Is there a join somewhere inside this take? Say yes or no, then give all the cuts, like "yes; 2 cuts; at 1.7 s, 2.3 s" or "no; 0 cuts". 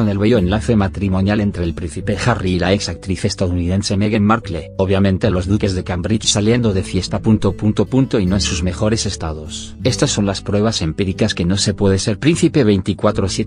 no; 0 cuts